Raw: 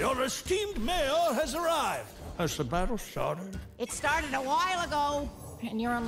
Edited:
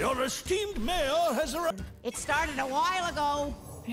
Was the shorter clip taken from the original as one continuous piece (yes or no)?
no